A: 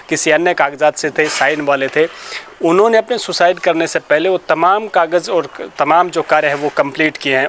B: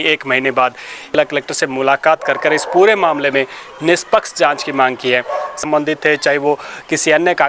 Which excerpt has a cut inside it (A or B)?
B